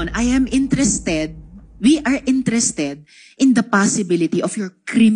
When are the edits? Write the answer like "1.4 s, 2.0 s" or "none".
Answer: none